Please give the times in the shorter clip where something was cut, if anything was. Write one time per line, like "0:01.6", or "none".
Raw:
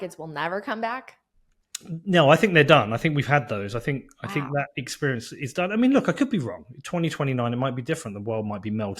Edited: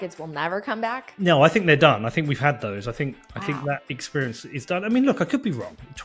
0:01.1